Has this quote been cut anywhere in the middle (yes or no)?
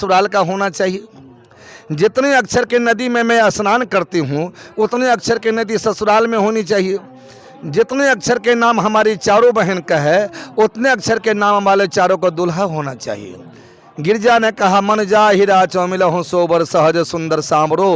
no